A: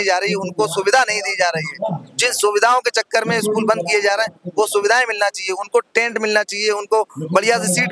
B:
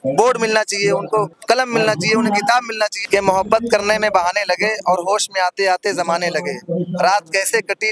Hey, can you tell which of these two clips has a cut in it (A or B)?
B